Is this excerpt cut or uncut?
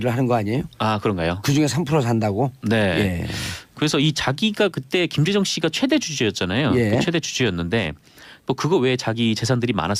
uncut